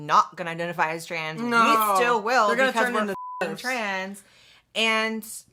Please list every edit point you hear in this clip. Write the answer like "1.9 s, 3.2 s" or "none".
none

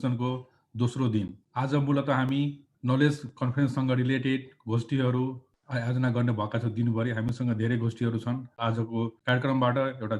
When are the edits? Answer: 1.4 s, 2.7 s, 5.5 s, 8.7 s

